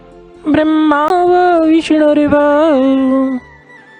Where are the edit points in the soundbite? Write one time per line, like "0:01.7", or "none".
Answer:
0:01.1